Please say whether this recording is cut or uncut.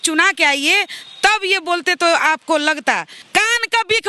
cut